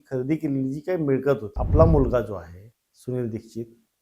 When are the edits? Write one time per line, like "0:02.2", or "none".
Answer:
0:01.6

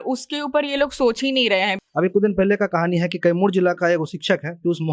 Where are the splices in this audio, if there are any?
0:01.8

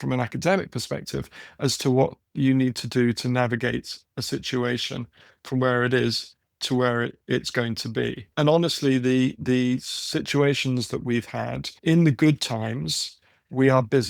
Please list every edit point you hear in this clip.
0:08.3
0:11.8

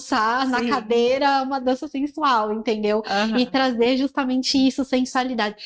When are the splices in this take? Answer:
none

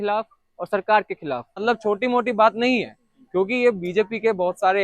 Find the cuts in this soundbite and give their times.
0:01.6

